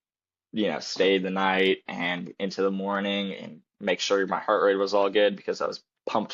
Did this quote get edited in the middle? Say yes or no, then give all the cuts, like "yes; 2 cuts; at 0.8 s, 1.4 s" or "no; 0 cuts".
no; 0 cuts